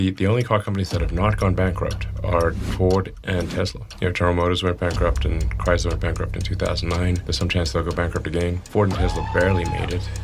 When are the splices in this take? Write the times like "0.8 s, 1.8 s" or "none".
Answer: 3.8 s, 7.2 s, 8.7 s